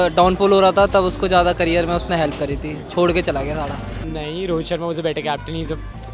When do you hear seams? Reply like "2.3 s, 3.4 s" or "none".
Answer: 3.9 s

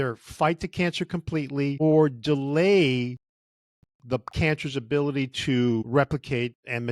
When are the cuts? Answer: 1.8 s, 5.9 s

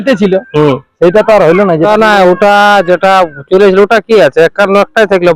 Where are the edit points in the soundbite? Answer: 1.9 s

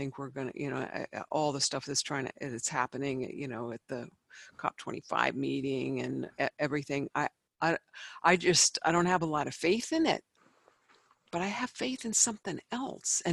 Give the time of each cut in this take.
10.3 s

